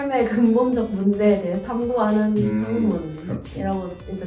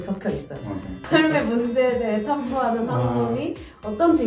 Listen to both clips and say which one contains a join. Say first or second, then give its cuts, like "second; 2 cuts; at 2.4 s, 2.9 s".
second; 1 cut; at 0.9 s